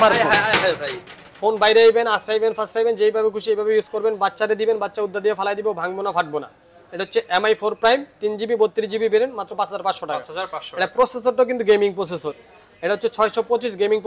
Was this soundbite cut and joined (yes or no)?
no